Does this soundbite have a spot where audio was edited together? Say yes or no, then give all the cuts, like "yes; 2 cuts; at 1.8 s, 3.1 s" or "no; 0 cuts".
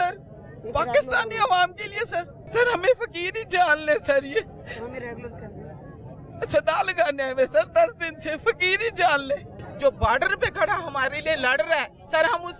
yes; 2 cuts; at 2.4 s, 9.6 s